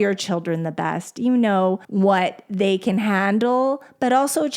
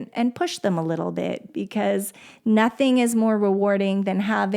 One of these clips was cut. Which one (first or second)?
first